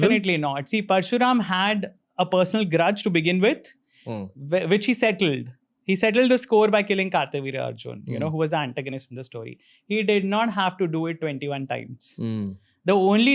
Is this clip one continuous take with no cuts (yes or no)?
yes